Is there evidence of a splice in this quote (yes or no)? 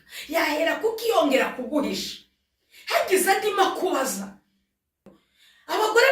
yes